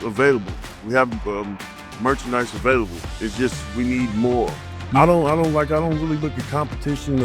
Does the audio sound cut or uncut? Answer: cut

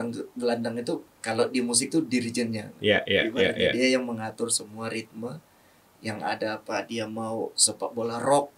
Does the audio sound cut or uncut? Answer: cut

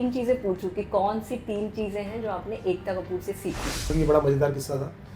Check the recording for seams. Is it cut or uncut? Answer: cut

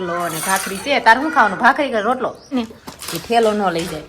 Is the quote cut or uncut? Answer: cut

